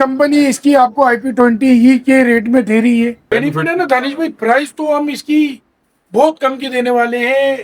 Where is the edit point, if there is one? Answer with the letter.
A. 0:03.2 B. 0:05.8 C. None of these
A